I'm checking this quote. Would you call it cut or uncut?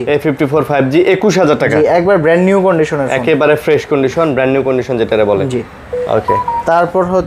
uncut